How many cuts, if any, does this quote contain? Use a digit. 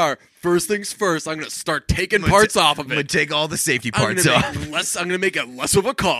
0